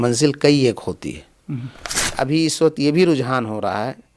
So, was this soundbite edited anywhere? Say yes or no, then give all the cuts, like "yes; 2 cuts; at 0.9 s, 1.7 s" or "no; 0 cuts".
yes; 1 cut; at 2.1 s